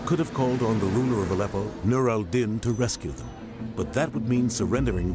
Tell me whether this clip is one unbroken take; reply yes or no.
no